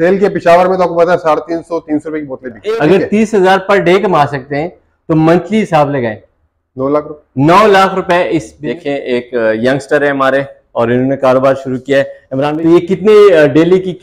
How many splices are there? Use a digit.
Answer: 3